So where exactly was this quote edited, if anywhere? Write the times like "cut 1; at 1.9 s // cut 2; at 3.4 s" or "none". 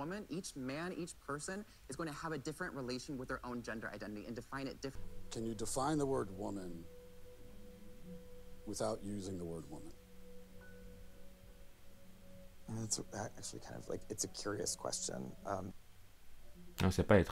cut 1; at 5.0 s